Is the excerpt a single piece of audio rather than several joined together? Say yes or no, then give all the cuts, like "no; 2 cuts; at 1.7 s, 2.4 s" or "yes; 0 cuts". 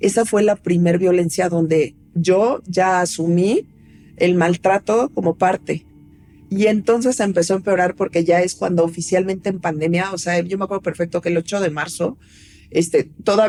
yes; 0 cuts